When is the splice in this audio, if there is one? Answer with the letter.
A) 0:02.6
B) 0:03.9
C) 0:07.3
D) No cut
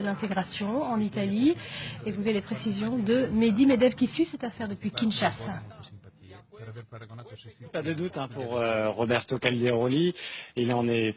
B